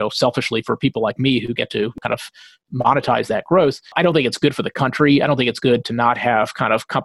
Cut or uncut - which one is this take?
cut